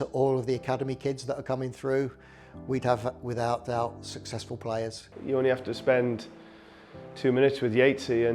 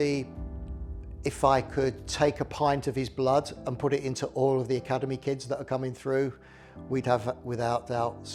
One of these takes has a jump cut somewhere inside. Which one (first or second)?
first